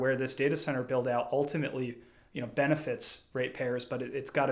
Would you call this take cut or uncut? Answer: uncut